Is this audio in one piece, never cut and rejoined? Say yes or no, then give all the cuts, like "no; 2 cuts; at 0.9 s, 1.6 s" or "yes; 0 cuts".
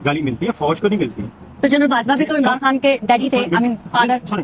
yes; 0 cuts